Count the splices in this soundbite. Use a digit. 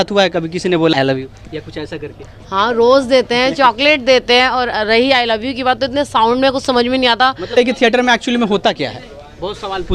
2